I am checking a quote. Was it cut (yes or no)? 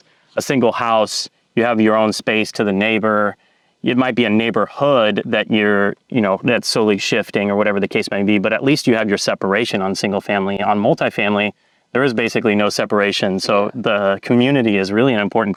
no